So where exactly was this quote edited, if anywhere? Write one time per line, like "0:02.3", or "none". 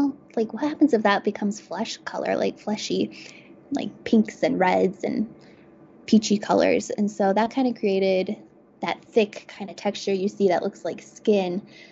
none